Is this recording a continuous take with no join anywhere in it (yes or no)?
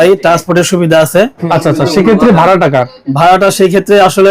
no